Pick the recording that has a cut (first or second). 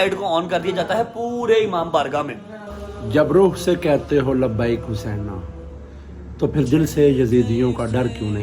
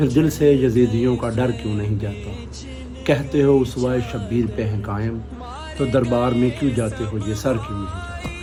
first